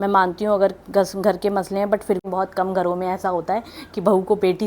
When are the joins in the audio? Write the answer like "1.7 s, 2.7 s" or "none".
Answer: 2.2 s